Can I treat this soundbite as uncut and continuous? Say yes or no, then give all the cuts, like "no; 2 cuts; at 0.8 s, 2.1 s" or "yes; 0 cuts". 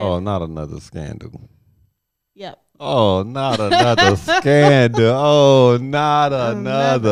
yes; 0 cuts